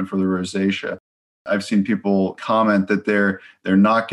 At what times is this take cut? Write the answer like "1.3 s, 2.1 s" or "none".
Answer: 1.4 s, 2.4 s